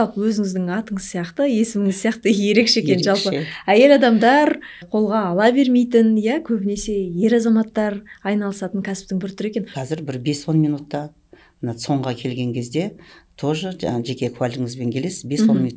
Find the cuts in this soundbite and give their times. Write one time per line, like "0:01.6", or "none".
0:04.8
0:09.8